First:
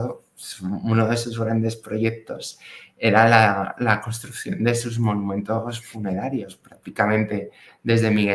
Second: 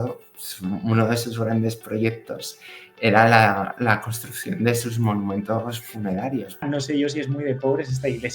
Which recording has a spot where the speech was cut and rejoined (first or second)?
second